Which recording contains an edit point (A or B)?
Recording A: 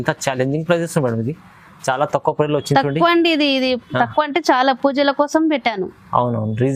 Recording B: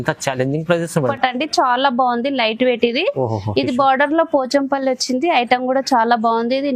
B